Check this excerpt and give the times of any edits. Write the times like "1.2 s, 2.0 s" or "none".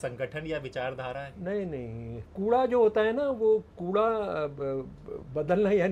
2.3 s